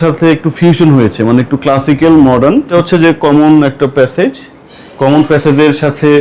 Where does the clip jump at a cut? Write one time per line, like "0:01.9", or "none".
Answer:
0:02.7